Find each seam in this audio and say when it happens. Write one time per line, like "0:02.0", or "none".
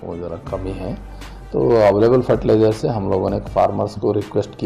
none